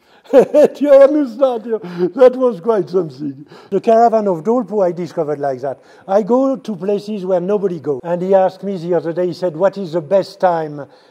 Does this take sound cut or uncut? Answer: cut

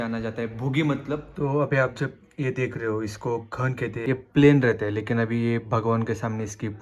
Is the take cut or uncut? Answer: cut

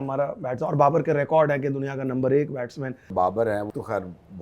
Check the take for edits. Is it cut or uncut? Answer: cut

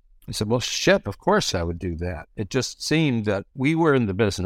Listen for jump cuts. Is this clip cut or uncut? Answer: cut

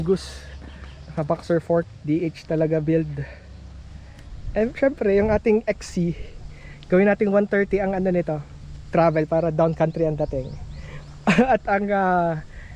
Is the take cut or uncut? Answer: uncut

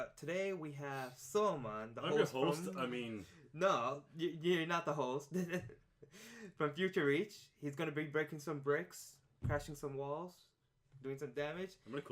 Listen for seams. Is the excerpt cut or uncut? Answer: cut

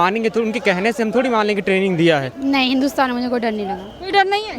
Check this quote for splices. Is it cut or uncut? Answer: cut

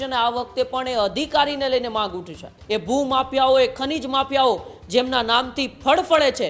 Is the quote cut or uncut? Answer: cut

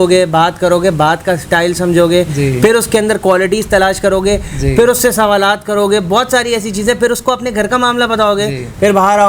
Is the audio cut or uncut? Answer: uncut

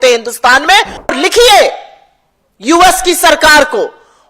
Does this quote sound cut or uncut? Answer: cut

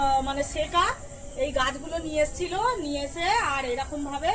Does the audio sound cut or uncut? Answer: uncut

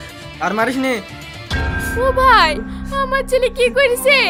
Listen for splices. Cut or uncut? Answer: uncut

